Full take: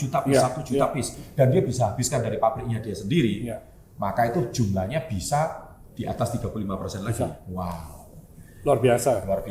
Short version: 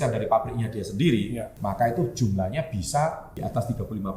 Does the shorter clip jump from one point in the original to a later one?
yes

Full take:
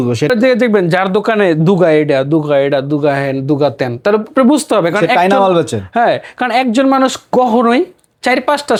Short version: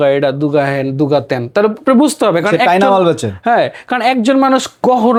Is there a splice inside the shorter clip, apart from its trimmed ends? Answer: no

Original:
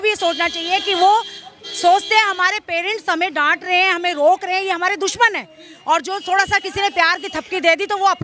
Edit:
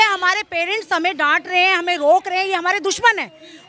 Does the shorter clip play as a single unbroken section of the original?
yes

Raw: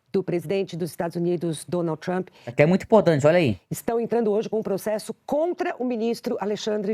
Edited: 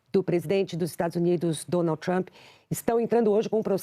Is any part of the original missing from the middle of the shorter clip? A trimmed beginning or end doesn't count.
yes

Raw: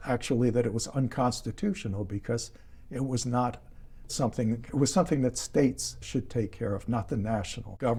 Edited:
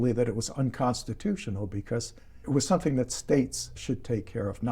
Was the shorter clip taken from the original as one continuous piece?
no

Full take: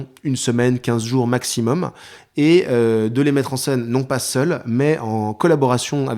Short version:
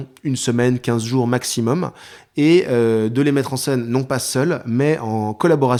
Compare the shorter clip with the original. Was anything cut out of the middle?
no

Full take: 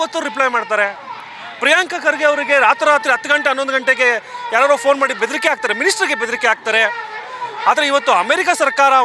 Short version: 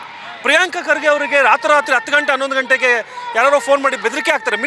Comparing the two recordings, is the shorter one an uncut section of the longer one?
yes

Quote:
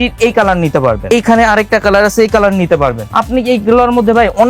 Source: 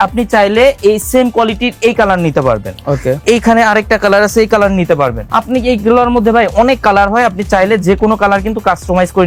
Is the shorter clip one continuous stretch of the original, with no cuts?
no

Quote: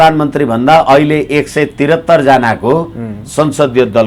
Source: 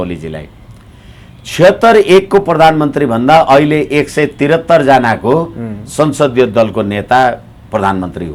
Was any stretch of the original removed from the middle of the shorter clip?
no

